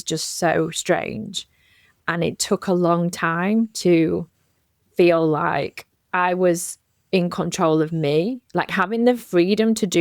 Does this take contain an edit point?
no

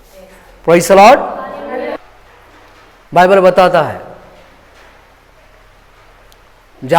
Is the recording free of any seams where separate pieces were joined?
no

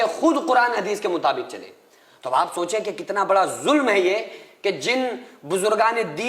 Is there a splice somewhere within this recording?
no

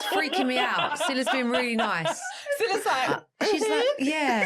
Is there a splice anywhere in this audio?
no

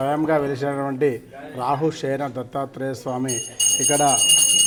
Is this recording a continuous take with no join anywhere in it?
yes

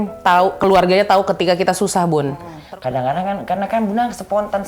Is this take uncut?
no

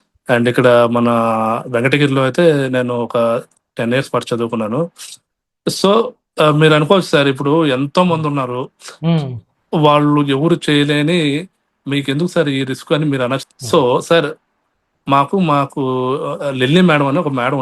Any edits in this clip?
yes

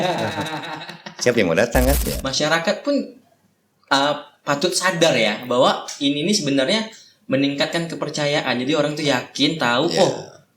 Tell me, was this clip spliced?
yes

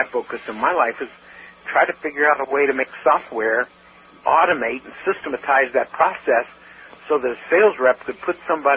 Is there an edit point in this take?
no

